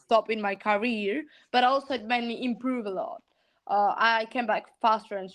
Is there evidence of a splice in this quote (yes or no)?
no